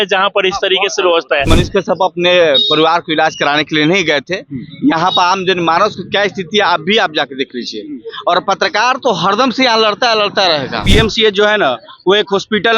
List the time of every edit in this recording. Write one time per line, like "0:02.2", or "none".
0:01.5
0:10.8